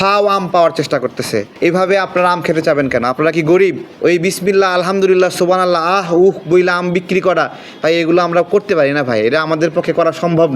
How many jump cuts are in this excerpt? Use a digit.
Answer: 2